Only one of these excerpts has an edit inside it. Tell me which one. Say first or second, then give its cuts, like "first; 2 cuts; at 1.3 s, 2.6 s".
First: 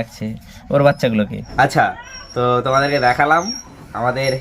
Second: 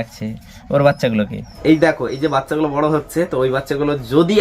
second; 1 cut; at 1.4 s